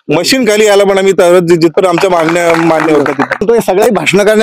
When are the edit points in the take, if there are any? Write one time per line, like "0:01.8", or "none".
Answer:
0:03.4